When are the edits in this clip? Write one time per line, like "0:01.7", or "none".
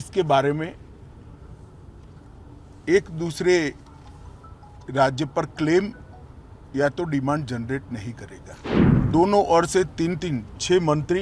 0:09.0